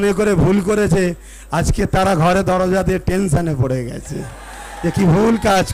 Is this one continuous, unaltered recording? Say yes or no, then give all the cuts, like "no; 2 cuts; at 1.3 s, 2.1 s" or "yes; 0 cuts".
yes; 0 cuts